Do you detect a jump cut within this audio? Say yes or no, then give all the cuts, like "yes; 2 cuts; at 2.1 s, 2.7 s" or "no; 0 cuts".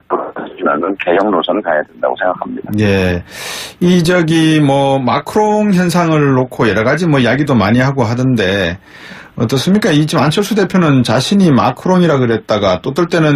no; 0 cuts